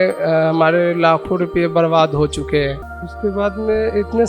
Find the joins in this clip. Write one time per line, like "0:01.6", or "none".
0:02.8